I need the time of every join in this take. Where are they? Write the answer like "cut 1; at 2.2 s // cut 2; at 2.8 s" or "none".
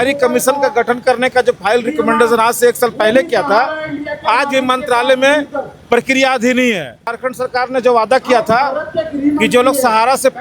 cut 1; at 7.0 s